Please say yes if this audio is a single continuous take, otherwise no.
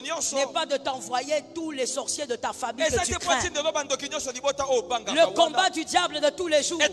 yes